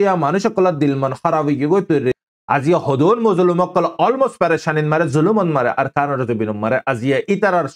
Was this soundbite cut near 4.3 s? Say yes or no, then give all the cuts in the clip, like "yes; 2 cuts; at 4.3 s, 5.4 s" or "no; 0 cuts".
no; 1 cut; at 2.2 s